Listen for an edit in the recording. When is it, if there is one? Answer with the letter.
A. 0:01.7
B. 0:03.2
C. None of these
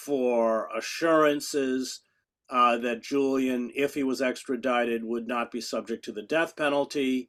C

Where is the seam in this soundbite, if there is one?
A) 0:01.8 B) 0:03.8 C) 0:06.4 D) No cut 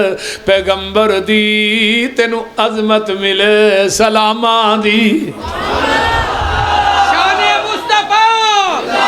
C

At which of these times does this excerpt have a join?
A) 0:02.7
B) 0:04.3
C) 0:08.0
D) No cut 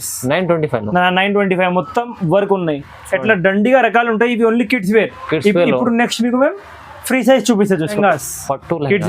C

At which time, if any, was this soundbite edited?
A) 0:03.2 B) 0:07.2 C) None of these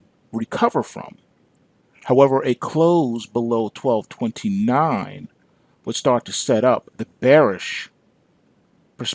A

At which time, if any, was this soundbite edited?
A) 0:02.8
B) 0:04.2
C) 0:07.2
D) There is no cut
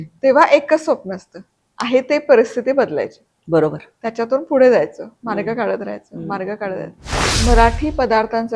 C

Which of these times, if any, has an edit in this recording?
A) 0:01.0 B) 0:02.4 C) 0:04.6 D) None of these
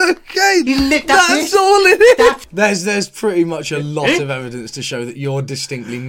B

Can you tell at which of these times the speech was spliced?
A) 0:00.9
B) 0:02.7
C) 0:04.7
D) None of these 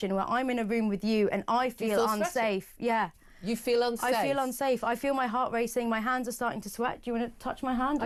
D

